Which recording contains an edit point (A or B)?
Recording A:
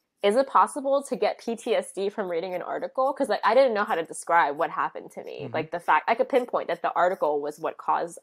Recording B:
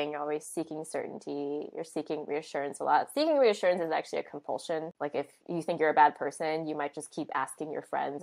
B